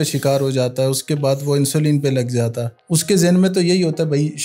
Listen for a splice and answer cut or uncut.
cut